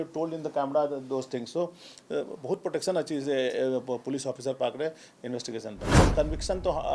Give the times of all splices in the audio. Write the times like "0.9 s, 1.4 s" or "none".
6.0 s